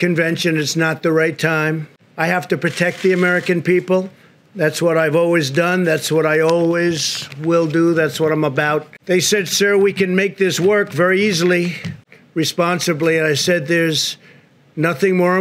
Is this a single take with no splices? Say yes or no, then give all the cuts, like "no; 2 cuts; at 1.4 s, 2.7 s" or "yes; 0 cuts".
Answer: no; 2 cuts; at 2.0 s, 12.0 s